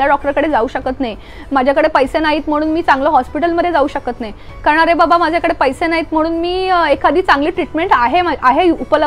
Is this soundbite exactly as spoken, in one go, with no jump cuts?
yes; 0 cuts

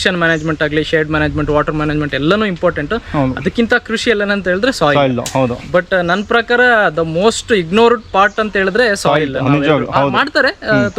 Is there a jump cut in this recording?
no; 0 cuts

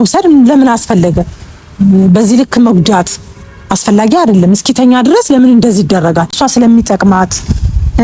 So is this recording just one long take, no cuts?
no; 1 cut; at 6.4 s

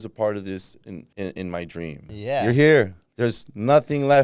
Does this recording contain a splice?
yes; 2 cuts; at 1.0 s, 2.2 s

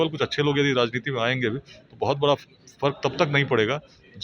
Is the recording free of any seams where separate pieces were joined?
yes; 0 cuts

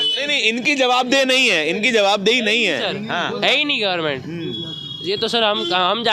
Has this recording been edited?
no; 0 cuts

